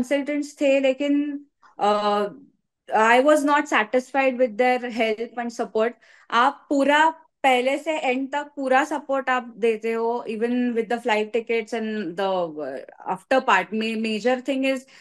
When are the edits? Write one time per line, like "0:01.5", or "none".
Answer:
none